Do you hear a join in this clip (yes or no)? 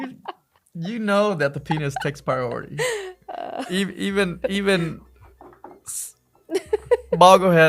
no